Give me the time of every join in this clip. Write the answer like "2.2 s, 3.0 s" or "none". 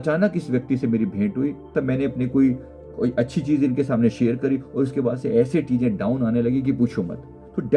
1.7 s, 2.7 s